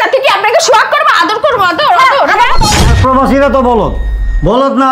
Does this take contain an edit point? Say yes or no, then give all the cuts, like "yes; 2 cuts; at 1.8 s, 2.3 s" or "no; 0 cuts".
yes; 1 cut; at 2.8 s